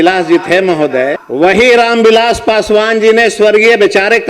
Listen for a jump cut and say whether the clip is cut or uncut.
cut